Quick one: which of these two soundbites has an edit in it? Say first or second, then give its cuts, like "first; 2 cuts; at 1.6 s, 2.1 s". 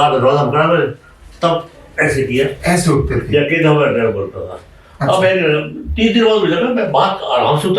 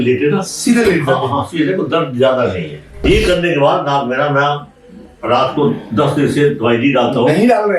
second; 1 cut; at 3.0 s